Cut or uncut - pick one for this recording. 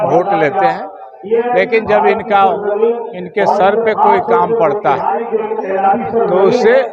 uncut